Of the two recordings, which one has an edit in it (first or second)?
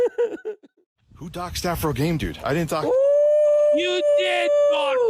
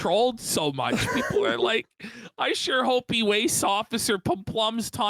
first